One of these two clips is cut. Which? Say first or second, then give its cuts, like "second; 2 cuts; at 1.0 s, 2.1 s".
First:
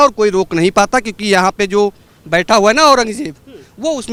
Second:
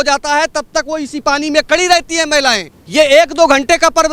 second; 1 cut; at 2.7 s